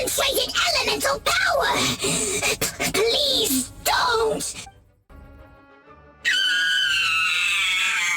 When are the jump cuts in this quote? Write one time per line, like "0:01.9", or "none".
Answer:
0:05.0